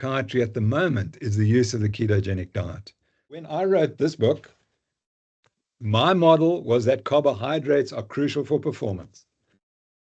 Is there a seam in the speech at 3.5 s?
yes; 1 cut; at 3.5 s

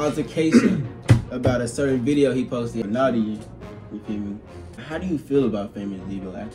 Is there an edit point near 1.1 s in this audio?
no; 2 cuts; at 2.8 s, 4.9 s

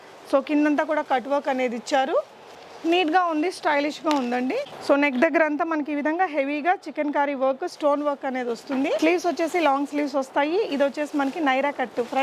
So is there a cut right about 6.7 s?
no; 3 cuts; at 2.5 s, 4.7 s, 9.0 s

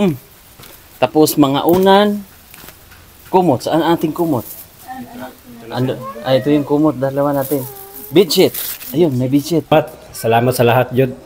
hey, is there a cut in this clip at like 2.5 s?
no; 1 cut; at 9.7 s

